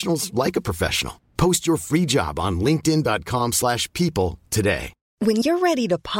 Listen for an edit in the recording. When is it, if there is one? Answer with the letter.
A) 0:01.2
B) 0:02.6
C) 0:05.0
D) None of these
C